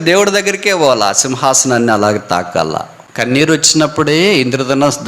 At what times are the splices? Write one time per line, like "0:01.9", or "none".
0:02.9